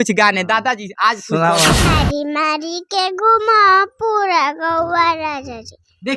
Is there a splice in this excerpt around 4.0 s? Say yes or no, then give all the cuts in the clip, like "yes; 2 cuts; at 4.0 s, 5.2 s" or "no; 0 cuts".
no; 1 cut; at 1.9 s